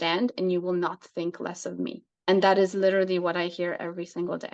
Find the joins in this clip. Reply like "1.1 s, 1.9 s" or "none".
2.1 s

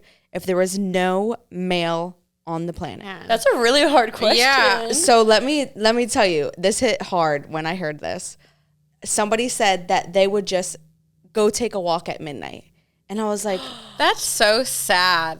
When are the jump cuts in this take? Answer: 3.1 s

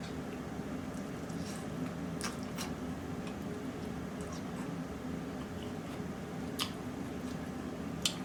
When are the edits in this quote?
none

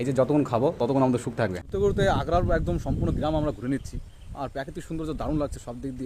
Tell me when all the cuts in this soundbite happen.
1.6 s

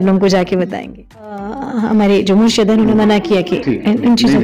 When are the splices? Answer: 1.6 s

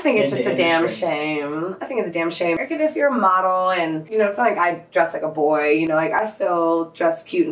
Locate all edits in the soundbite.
2.6 s, 4.0 s

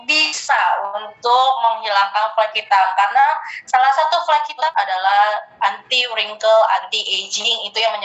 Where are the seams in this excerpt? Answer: 4.7 s

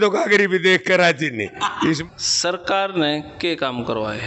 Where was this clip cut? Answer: 2.0 s

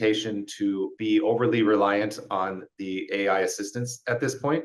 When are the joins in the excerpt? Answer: 0.9 s

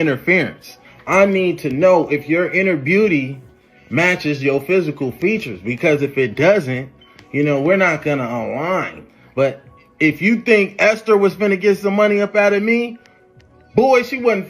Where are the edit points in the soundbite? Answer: 9.0 s

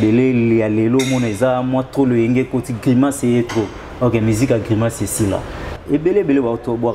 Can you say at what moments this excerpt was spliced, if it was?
5.7 s

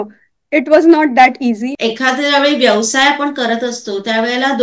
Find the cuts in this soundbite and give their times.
1.7 s

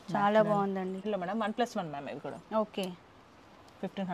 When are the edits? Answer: 1.0 s

